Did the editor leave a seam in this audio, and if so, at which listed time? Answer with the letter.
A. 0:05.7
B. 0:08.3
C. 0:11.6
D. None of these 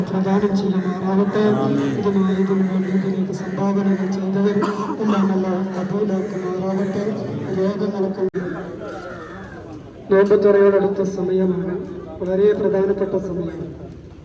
B